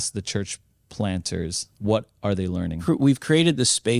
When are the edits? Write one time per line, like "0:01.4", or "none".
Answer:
0:01.7
0:02.8

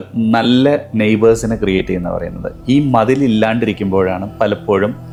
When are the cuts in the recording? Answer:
none

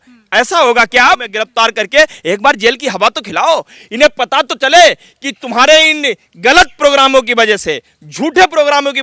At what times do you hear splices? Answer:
0:01.4

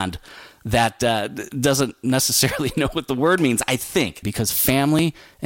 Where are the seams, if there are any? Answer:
0:04.3

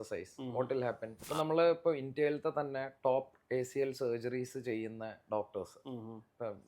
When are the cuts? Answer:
0:01.2

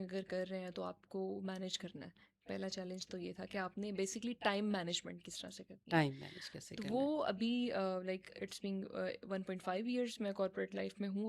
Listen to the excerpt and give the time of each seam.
none

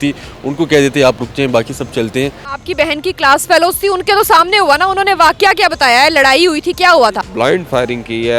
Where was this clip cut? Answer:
0:02.5
0:07.2

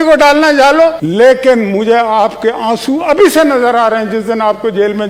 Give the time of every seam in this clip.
none

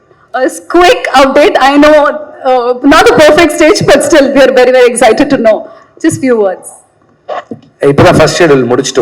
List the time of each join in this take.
none

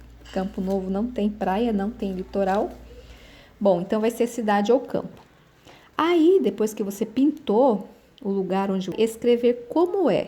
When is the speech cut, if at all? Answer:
0:08.9

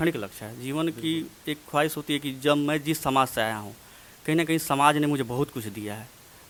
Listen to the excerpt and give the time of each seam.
none

